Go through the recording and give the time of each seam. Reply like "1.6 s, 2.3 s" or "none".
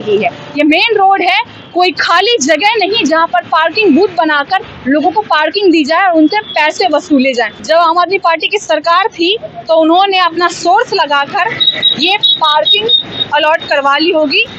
7.6 s